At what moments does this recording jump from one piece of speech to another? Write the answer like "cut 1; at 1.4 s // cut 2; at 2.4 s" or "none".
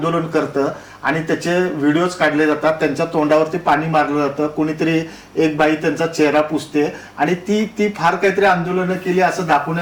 none